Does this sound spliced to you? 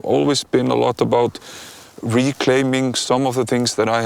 no; 0 cuts

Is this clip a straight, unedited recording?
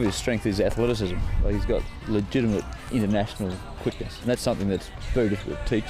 no; 4 cuts; at 1.9 s, 2.8 s, 4.2 s, 5.0 s

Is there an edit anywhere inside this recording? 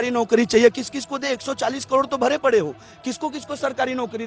no; 0 cuts

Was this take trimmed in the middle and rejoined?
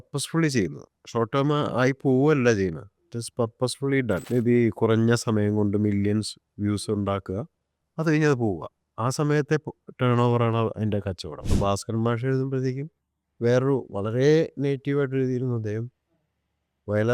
yes; 2 cuts; at 4.2 s, 11.4 s

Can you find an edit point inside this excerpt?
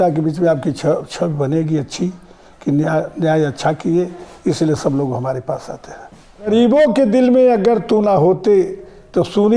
yes; 1 cut; at 6.5 s

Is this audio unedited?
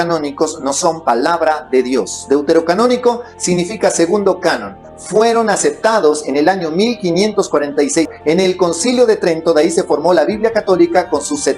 yes; 0 cuts

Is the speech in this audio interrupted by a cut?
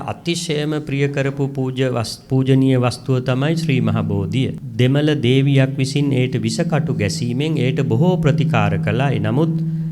yes; 1 cut; at 4.6 s

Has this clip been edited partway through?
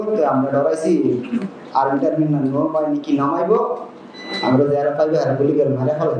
no; 0 cuts

